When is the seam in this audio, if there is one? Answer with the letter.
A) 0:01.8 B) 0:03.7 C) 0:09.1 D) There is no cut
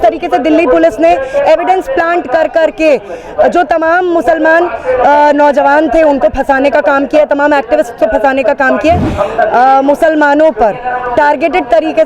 C